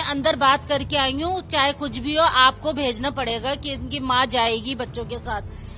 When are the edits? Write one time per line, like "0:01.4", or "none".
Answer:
none